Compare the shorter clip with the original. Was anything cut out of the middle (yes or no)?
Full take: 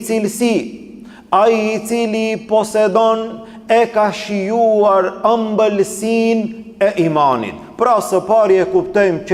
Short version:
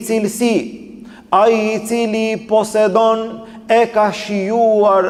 no